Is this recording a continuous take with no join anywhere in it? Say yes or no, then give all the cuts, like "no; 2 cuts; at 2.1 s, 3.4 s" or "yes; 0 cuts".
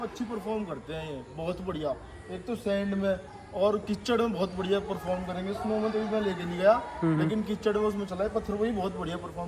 yes; 0 cuts